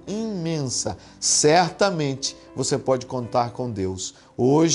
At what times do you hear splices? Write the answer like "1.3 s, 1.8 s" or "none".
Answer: none